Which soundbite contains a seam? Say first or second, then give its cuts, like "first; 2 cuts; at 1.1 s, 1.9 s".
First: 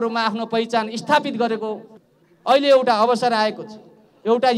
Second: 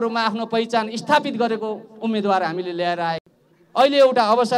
first; 1 cut; at 1.9 s